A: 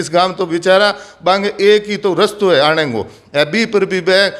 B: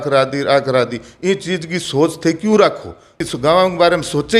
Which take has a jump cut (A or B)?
B